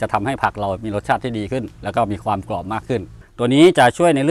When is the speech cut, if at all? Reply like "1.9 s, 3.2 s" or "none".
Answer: 3.2 s